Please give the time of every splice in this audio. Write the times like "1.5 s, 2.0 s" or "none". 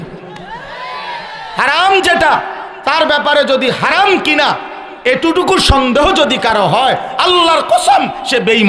none

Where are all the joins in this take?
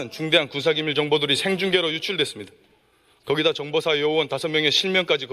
none

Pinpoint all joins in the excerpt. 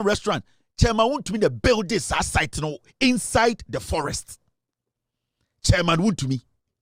none

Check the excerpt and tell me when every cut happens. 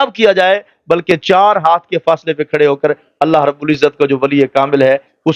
none

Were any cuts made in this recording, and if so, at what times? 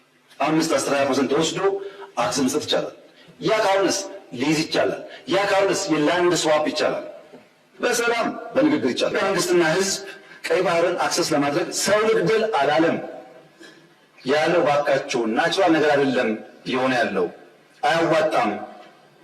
9.1 s

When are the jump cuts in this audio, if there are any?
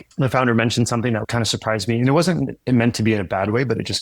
1.2 s

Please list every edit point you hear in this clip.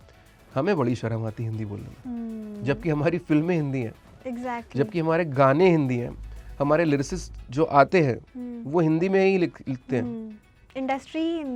none

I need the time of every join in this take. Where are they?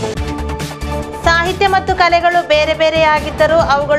1.0 s

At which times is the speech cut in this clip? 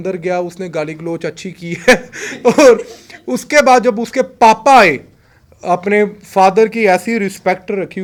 none

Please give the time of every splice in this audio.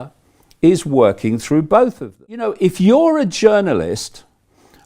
2.5 s

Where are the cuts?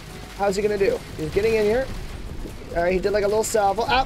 none

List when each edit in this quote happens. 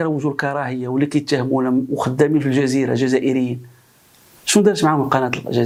none

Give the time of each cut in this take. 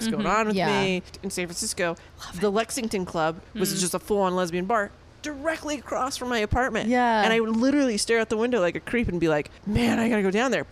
1.1 s, 3.4 s, 9.6 s

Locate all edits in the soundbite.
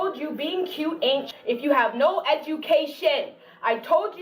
1.3 s

